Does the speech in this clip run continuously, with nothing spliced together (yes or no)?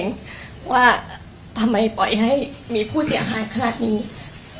yes